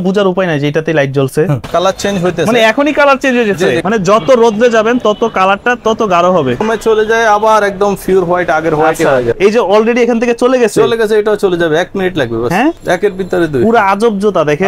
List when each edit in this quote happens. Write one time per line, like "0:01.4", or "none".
0:01.7
0:03.8
0:06.6
0:09.3
0:12.8